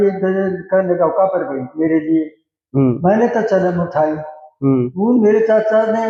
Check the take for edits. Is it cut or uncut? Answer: uncut